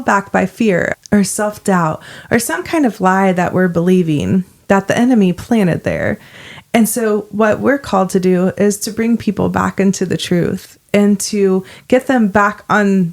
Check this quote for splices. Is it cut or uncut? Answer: cut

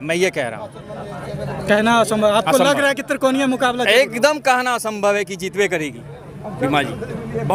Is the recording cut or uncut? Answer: uncut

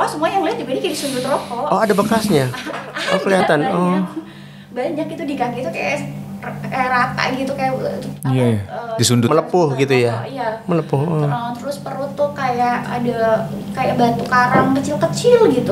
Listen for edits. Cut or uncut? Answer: uncut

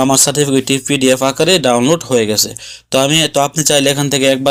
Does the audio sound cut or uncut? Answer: uncut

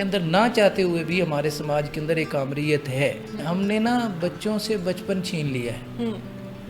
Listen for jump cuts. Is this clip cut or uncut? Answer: cut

